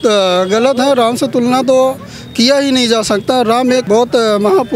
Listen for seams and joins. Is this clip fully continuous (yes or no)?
no